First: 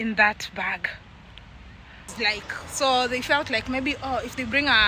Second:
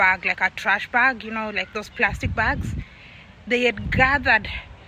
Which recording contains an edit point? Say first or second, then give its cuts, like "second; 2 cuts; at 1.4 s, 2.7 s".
first; 1 cut; at 2.0 s